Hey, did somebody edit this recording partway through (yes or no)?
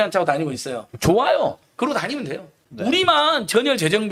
no